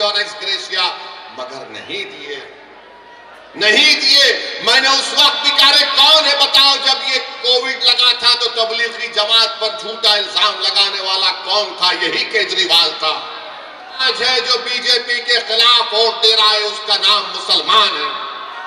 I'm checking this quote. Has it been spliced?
yes; 1 cut; at 14.0 s

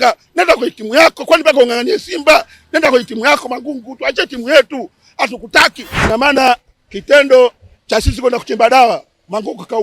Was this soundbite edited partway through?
yes; 1 cut; at 5.9 s

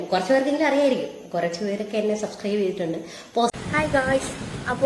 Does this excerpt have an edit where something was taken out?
yes; 1 cut; at 3.5 s

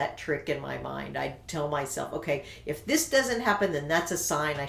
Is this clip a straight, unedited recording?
yes; 0 cuts

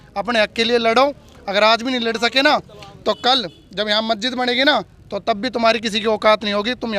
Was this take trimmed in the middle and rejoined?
no; 0 cuts

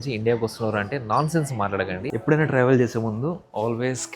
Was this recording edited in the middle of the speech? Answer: yes; 1 cut; at 2.0 s

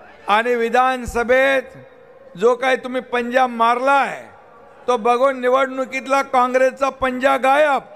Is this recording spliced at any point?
no; 0 cuts

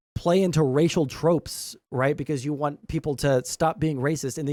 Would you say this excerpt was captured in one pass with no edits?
yes; 0 cuts

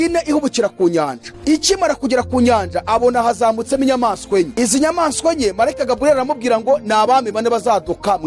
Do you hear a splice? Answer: yes; 2 cuts; at 1.2 s, 4.5 s

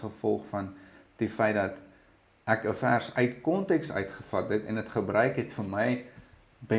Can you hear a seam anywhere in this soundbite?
no; 0 cuts

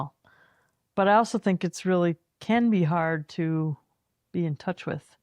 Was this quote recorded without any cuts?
yes; 0 cuts

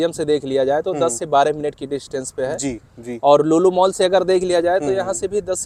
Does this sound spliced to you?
no; 0 cuts

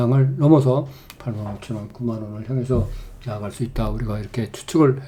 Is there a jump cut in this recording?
no; 0 cuts

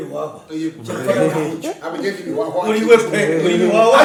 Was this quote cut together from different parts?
no; 0 cuts

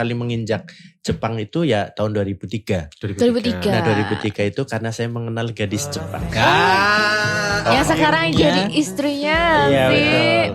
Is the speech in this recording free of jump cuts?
yes; 0 cuts

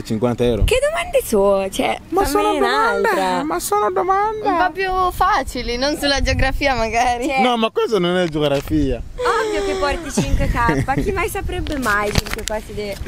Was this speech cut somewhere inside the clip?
no; 0 cuts

